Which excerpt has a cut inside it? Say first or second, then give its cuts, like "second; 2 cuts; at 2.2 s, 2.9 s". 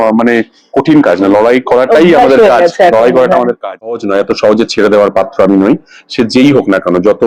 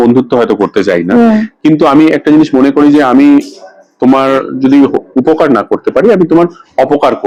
first; 1 cut; at 4.0 s